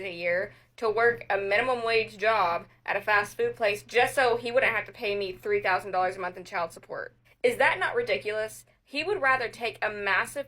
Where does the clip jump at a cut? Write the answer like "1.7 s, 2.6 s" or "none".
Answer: 8.3 s